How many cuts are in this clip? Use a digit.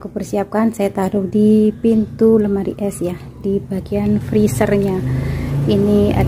0